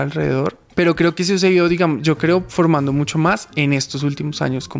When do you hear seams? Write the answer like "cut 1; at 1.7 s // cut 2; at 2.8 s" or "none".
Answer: none

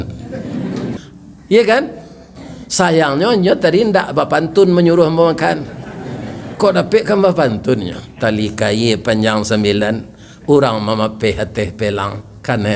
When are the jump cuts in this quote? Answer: cut 1; at 1.0 s

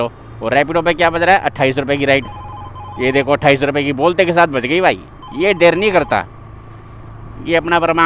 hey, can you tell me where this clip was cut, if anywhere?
none

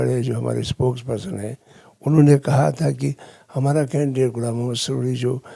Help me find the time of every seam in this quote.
none

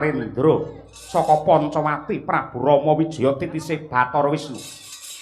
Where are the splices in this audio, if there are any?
none

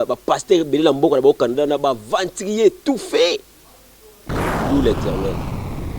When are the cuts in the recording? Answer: cut 1; at 4.1 s

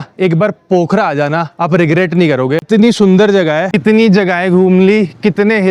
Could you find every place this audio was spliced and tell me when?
cut 1; at 2.7 s // cut 2; at 3.7 s

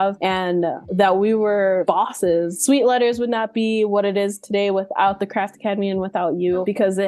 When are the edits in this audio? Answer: cut 1; at 2.6 s

